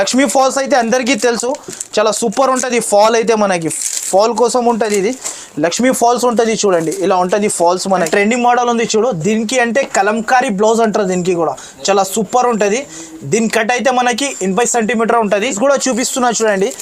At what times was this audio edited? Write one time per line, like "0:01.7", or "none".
0:08.1
0:15.5